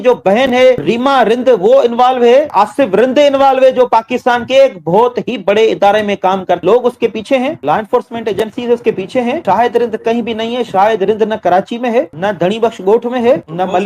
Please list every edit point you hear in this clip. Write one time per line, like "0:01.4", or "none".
0:00.8
0:02.5
0:06.6